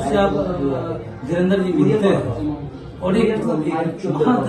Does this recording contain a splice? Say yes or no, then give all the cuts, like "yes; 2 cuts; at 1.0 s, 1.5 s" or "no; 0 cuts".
yes; 1 cut; at 3.4 s